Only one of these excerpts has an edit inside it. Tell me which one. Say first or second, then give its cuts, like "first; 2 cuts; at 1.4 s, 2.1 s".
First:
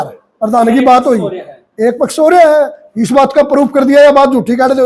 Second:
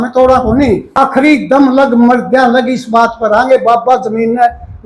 second; 1 cut; at 1.0 s